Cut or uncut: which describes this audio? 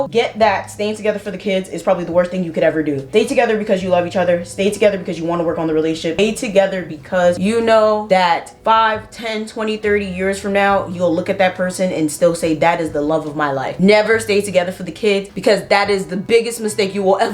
uncut